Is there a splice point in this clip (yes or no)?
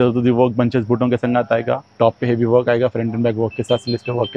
yes